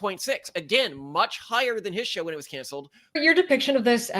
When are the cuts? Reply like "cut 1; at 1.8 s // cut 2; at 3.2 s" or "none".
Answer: cut 1; at 3.2 s